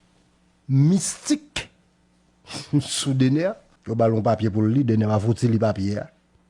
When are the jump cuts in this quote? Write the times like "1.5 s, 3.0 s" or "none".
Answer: 3.7 s